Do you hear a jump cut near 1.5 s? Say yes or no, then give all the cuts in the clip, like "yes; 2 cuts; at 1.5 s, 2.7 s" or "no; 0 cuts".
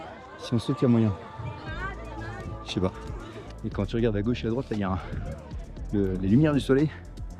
no; 0 cuts